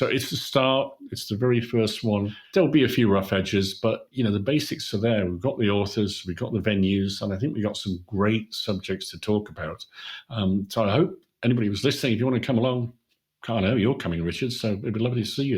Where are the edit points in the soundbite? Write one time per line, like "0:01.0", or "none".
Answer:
0:02.4